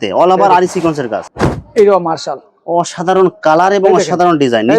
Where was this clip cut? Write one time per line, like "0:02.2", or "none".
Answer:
0:01.2